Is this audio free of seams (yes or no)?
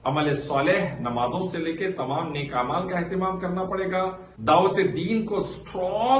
no